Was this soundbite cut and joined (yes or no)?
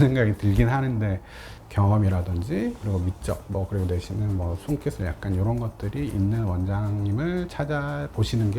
yes